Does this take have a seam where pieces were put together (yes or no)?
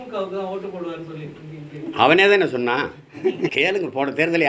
yes